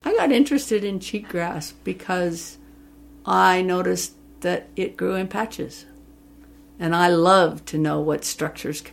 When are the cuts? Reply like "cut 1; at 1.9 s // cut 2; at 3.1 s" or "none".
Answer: none